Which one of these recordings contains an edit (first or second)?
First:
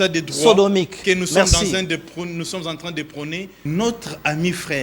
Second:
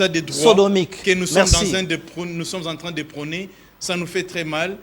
first